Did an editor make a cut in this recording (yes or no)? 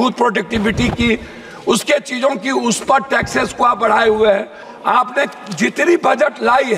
yes